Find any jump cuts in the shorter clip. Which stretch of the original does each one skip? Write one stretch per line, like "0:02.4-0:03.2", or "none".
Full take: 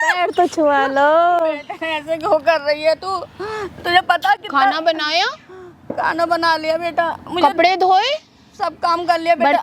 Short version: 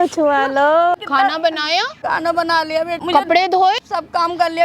0:01.3-0:04.4
0:05.4-0:05.9
0:06.9-0:07.2
0:08.1-0:08.5